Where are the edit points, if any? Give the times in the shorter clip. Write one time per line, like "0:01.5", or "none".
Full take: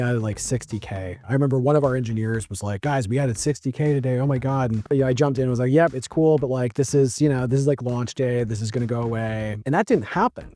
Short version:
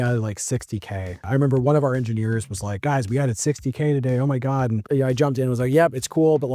none